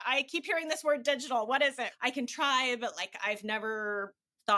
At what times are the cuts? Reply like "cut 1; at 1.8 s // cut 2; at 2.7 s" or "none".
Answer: cut 1; at 1.9 s